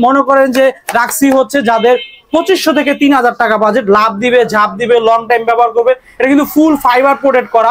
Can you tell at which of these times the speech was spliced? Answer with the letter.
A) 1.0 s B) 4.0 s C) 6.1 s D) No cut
D